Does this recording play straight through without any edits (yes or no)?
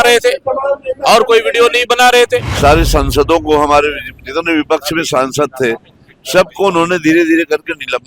no